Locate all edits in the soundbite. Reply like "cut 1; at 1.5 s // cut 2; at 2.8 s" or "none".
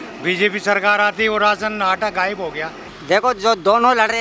cut 1; at 2.9 s

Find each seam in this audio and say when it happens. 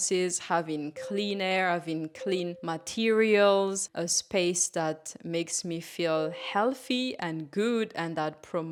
none

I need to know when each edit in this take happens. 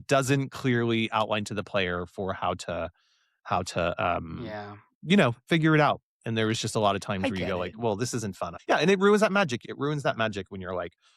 cut 1; at 8.6 s // cut 2; at 9.6 s

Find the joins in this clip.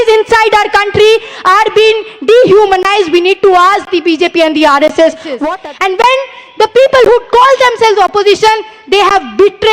cut 1; at 5.3 s

